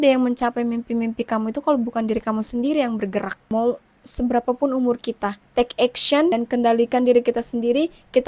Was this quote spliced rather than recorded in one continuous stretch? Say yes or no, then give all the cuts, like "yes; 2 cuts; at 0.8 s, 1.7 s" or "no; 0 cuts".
yes; 3 cuts; at 3.4 s, 5.4 s, 6.3 s